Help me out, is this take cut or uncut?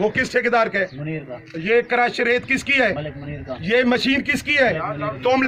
uncut